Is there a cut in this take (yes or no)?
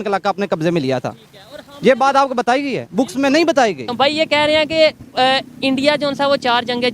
yes